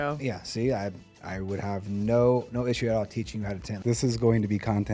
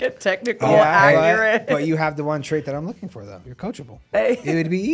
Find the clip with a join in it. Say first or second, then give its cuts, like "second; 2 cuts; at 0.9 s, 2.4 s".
first; 1 cut; at 3.7 s